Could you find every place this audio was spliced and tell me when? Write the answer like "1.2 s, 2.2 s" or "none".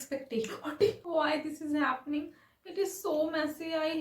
1.0 s